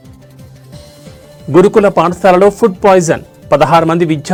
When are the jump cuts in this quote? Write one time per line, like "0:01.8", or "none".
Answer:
none

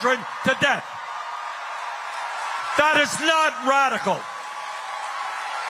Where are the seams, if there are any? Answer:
none

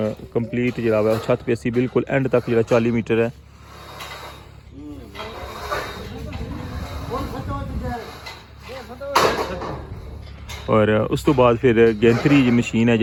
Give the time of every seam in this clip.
none

